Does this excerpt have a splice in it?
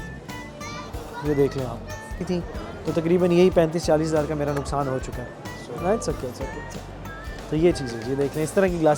yes; 1 cut; at 2.2 s

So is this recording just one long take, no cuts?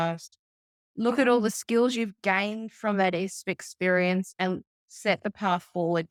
yes; 0 cuts

